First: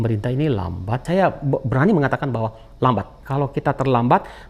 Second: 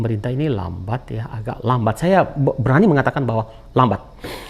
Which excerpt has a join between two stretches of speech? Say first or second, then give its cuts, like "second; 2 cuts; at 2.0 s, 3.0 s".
first; 2 cuts; at 1.0 s, 3.2 s